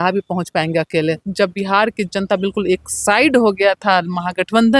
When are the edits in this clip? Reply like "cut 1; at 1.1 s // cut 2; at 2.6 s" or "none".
cut 1; at 1.3 s

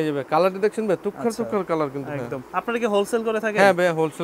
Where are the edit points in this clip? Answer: none

